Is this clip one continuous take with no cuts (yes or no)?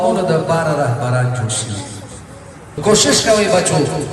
no